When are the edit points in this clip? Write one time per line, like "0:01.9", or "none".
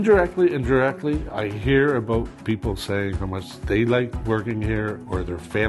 0:03.5
0:04.2

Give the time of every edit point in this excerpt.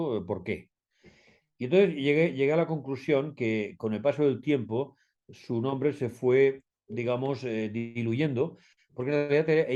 none

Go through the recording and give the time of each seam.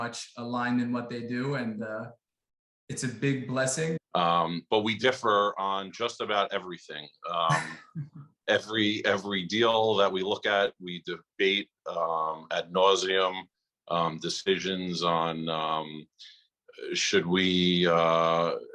0:04.0

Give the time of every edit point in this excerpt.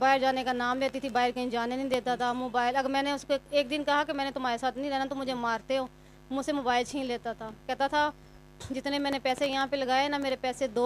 none

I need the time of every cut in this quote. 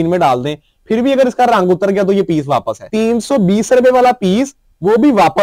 none

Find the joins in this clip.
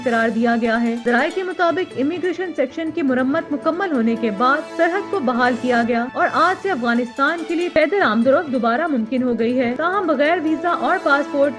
none

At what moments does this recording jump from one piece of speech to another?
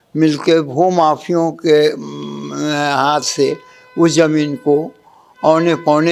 none

